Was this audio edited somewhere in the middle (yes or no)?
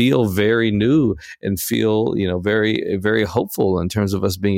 no